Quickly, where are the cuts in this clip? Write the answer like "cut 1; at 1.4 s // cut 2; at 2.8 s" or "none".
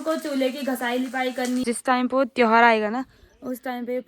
cut 1; at 1.6 s